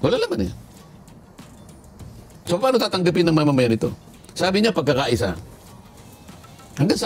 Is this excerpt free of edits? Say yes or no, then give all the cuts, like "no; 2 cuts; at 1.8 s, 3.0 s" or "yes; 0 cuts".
yes; 0 cuts